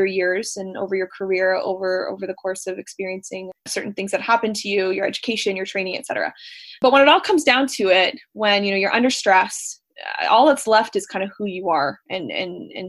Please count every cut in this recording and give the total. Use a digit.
0